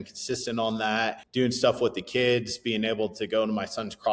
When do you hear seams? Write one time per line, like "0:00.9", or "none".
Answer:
0:01.2